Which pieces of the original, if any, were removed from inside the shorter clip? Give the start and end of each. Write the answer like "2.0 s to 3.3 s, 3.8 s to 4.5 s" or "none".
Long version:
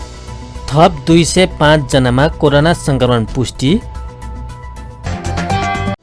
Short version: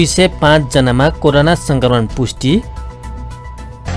none